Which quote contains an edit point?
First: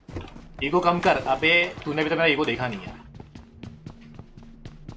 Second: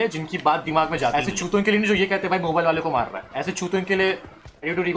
second; 1 cut; at 1.1 s

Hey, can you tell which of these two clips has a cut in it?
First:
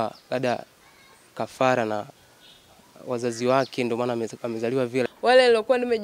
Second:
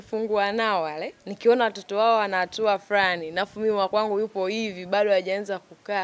first; 1 cut; at 5.1 s

